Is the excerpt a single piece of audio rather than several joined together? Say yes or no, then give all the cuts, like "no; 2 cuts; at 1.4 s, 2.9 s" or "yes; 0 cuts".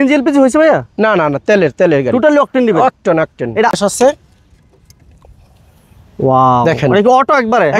no; 1 cut; at 3.7 s